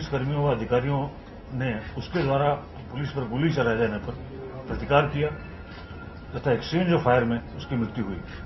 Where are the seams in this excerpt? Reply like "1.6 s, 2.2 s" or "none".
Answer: none